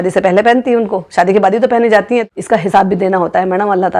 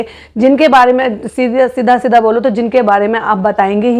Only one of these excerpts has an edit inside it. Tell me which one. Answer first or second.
first